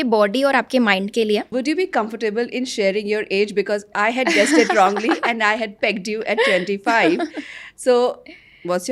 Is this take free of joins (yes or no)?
no